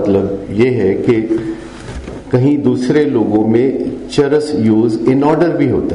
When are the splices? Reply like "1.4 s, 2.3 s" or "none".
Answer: none